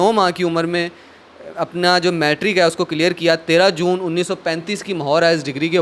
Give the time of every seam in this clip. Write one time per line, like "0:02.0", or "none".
none